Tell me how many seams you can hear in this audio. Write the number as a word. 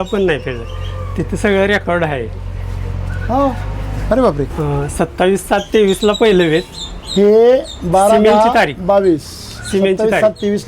one